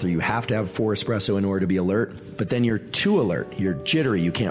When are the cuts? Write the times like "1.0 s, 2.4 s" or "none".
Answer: 2.2 s